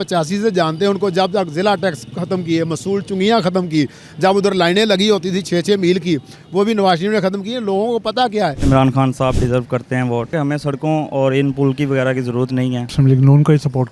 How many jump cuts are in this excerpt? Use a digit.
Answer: 3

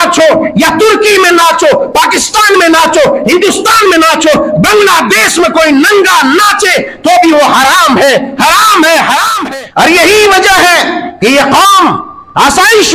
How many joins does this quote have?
1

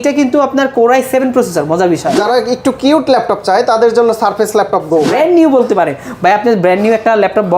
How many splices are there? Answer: 2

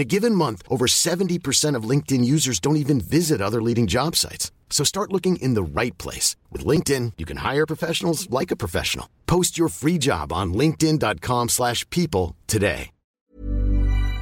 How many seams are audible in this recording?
1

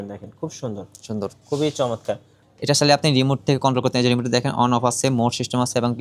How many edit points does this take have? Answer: 1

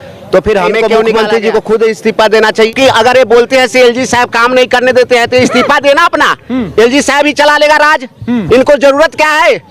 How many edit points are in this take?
2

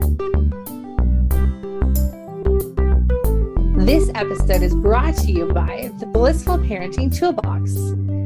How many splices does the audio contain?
0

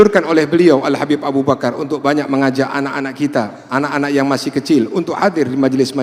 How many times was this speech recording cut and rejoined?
0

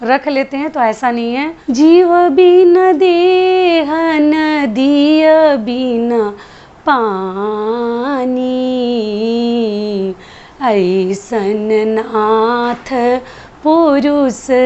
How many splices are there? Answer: 1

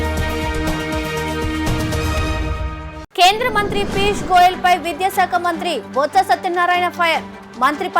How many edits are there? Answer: 1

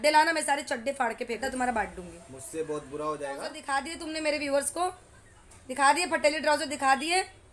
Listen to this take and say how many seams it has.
2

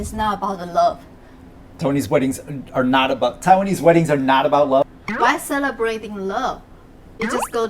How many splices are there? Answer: 1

